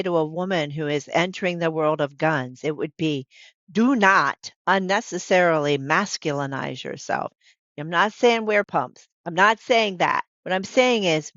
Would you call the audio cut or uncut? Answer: cut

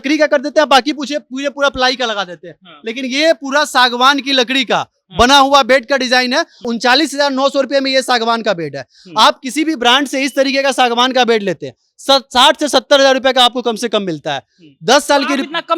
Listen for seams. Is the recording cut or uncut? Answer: cut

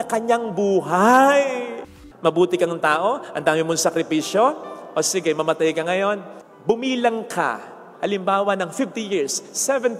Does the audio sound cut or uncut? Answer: cut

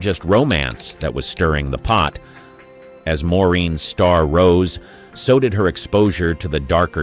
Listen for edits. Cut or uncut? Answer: uncut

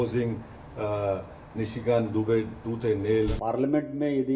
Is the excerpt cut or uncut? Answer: cut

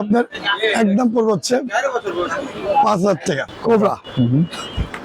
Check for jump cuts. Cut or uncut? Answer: cut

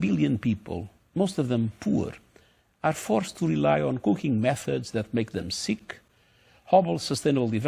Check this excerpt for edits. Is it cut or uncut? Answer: uncut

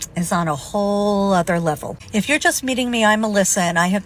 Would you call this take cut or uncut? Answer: uncut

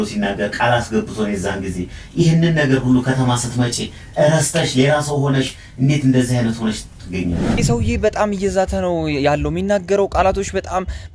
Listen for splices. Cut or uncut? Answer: cut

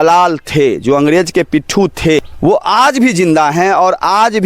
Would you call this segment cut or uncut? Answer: cut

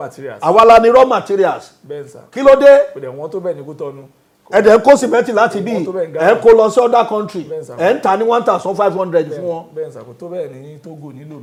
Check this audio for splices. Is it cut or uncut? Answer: uncut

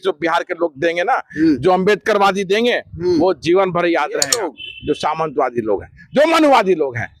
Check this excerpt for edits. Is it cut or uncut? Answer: cut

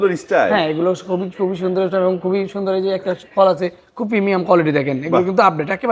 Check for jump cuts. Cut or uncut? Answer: uncut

